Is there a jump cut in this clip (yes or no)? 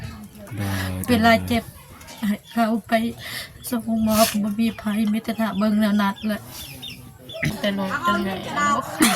yes